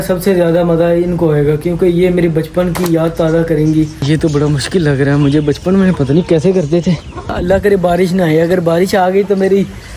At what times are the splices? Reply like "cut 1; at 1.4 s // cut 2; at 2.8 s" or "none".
cut 1; at 4.0 s // cut 2; at 7.3 s

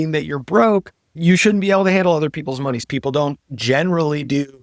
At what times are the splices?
cut 1; at 2.8 s

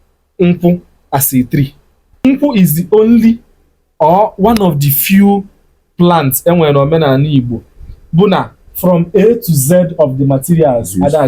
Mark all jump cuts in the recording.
cut 1; at 2.2 s

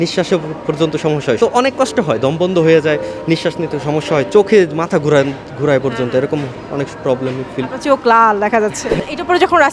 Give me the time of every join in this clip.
cut 1; at 1.4 s // cut 2; at 8.9 s

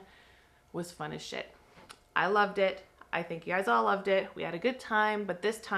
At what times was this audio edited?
none

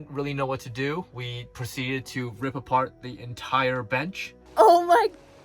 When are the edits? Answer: cut 1; at 4.3 s

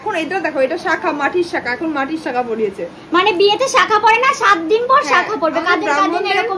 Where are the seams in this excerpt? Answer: none

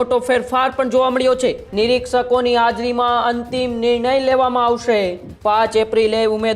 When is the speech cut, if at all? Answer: cut 1; at 1.6 s // cut 2; at 5.3 s

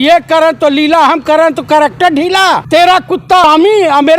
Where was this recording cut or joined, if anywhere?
cut 1; at 2.6 s // cut 2; at 3.4 s

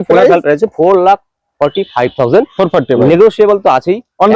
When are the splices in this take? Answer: none

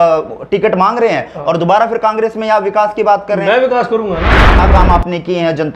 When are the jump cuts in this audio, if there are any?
cut 1; at 4.6 s

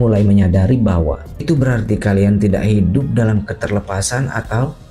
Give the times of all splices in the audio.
cut 1; at 1.3 s

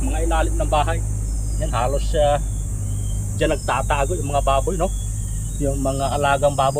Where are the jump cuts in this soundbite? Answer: none

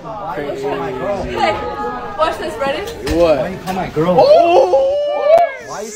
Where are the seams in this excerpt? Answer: cut 1; at 5.0 s

